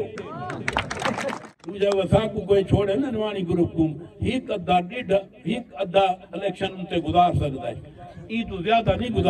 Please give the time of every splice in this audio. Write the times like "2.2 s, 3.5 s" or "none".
1.4 s

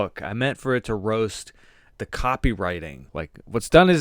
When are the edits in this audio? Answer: 3.0 s

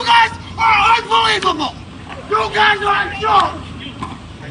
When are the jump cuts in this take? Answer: 2.1 s

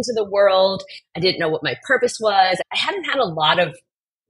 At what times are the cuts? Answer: 2.6 s

